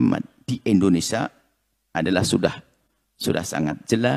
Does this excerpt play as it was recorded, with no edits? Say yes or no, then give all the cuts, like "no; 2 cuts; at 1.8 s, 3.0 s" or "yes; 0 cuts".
yes; 0 cuts